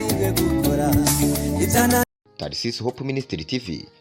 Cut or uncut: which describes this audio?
cut